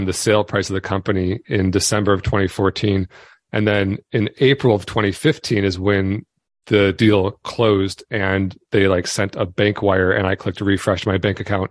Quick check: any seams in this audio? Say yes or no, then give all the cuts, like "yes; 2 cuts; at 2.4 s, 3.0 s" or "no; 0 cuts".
no; 0 cuts